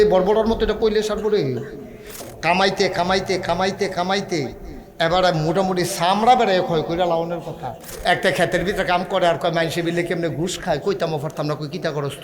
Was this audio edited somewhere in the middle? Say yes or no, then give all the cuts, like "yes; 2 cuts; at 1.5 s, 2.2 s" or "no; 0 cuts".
yes; 2 cuts; at 2.1 s, 7.9 s